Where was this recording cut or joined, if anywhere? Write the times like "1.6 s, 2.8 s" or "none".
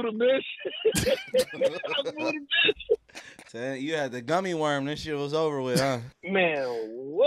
3.5 s, 6.1 s